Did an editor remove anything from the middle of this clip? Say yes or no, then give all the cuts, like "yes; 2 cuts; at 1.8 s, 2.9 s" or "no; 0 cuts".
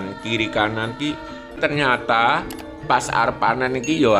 yes; 1 cut; at 1.6 s